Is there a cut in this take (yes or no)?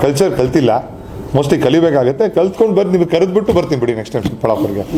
no